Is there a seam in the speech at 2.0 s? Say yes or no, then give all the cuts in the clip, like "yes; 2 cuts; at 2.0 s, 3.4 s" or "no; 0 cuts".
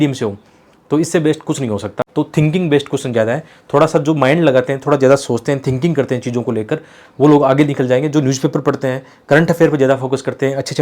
yes; 1 cut; at 2.0 s